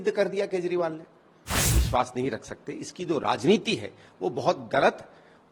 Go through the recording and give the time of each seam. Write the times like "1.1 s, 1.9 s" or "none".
1.6 s